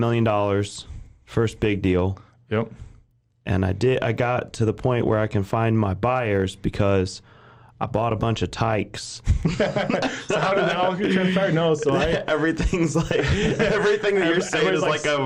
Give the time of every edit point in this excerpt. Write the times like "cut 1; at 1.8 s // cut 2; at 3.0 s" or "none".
none